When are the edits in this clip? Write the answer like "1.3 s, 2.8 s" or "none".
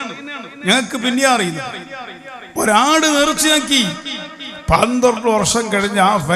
none

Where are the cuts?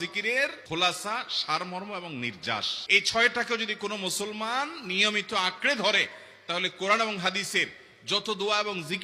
none

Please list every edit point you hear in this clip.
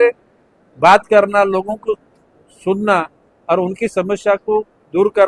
none

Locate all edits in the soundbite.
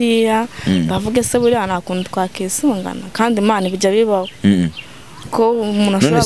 none

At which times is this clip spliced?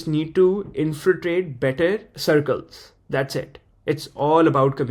none

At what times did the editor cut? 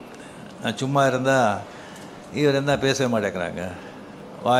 none

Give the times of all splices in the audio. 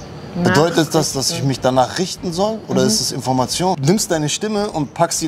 3.8 s

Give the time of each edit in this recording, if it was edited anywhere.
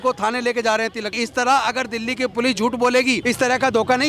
1.2 s, 3.2 s

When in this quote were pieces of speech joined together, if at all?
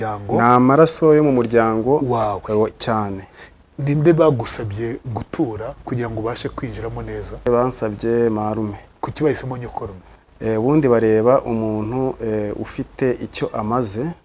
7.5 s, 8.9 s

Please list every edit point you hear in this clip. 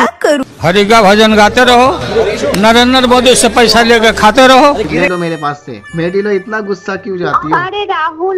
5.0 s

